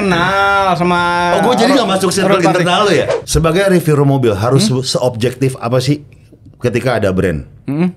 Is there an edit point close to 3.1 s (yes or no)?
yes